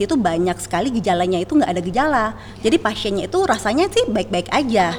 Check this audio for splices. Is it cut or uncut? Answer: uncut